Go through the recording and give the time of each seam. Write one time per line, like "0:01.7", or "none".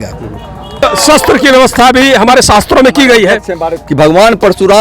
0:00.8
0:03.7